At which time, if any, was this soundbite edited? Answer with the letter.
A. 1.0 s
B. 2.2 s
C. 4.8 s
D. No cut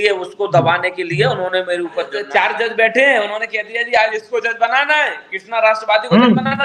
B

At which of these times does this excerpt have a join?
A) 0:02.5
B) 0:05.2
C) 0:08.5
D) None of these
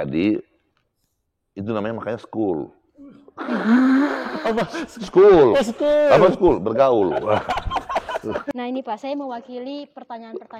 C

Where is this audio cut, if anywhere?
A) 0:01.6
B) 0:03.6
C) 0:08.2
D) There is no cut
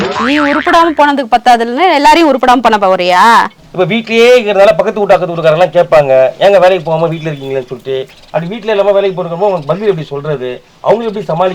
B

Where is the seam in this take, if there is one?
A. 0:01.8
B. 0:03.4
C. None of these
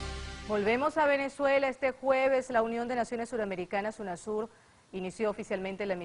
B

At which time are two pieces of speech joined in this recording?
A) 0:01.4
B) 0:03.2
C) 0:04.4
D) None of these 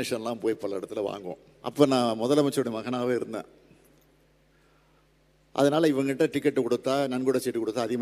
A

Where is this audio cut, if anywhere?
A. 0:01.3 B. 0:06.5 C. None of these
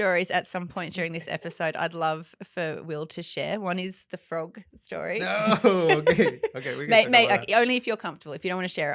C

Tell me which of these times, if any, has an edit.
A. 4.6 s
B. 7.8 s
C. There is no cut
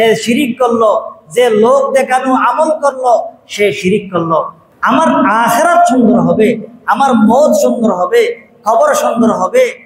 A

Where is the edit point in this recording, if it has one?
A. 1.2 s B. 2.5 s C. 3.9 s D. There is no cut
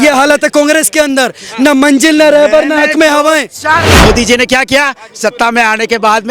C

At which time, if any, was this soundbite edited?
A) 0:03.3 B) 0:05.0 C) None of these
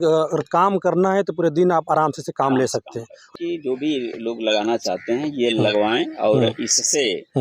A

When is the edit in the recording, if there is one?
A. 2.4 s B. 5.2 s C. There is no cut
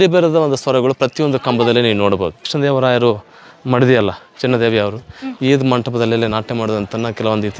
A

